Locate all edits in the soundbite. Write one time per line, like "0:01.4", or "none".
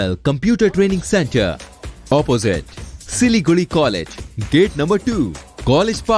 none